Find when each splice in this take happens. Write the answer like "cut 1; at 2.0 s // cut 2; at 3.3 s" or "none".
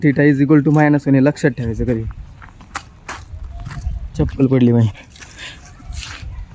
none